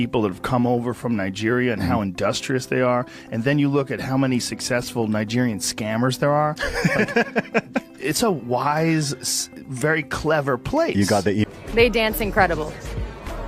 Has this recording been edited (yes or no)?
yes